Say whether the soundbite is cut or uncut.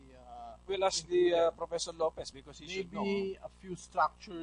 cut